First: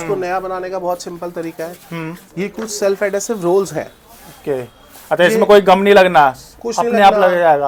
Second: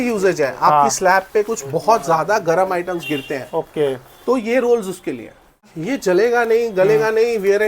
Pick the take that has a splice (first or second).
second